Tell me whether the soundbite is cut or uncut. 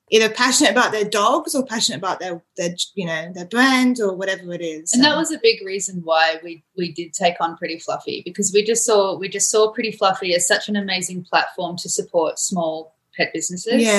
uncut